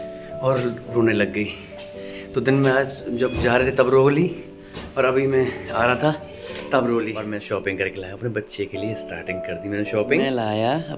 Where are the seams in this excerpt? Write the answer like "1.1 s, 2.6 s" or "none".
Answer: 7.3 s, 10.2 s